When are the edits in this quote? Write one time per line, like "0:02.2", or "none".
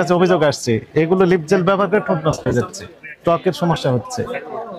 none